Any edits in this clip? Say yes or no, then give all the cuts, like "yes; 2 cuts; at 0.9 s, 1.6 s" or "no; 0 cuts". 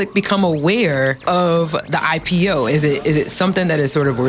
yes; 1 cut; at 1.2 s